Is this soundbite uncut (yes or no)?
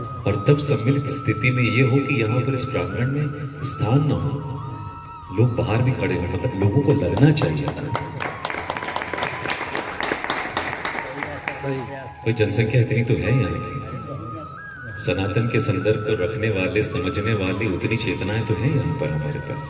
yes